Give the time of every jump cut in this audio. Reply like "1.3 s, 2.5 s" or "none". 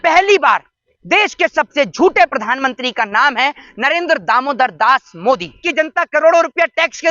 5.6 s